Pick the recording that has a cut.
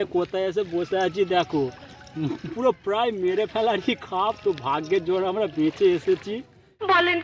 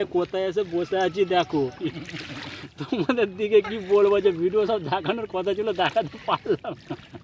second; 1 cut; at 1.8 s

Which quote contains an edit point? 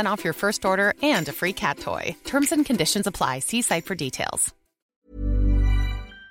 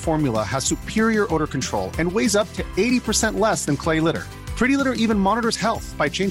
first; 1 cut; at 4.9 s

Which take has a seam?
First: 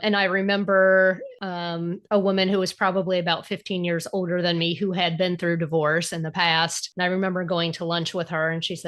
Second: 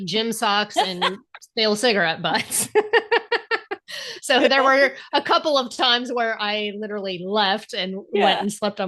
first; 2 cuts; at 1.3 s, 6.8 s

